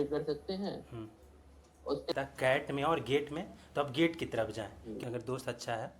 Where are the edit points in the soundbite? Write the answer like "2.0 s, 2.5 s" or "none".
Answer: 2.1 s, 5.0 s